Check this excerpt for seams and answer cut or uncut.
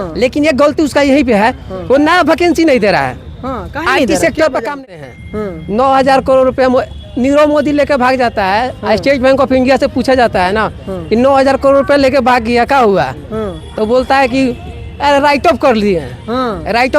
cut